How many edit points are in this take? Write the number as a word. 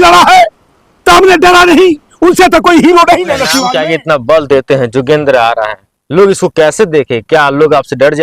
one